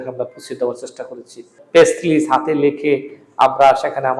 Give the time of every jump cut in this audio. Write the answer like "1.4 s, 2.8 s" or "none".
1.5 s